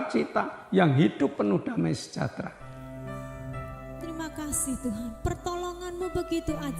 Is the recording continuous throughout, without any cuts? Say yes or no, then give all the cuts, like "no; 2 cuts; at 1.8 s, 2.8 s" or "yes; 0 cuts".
no; 1 cut; at 2.7 s